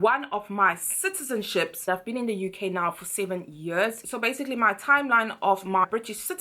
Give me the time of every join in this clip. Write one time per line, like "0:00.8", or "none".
0:01.9
0:04.0

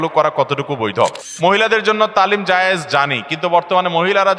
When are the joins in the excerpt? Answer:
0:01.2

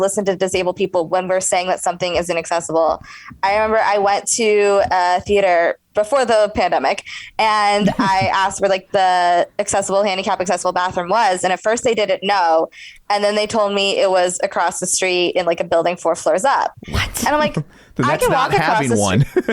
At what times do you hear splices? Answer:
0:05.8

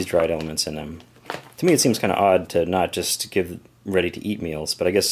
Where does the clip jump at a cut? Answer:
0:03.7

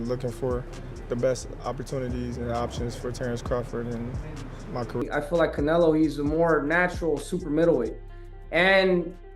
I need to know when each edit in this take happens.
0:04.7

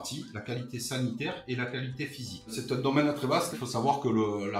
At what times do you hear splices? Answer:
0:02.6
0:03.5

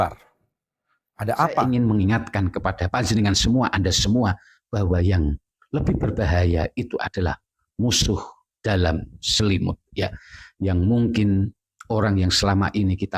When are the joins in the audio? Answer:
0:01.6

